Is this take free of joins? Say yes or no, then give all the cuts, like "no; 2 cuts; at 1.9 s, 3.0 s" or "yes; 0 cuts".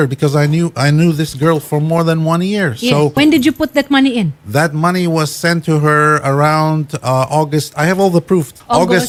yes; 0 cuts